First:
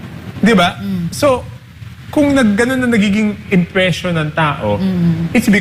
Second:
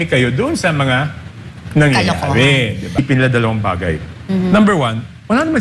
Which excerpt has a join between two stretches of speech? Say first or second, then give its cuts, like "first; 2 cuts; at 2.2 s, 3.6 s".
second; 1 cut; at 3.0 s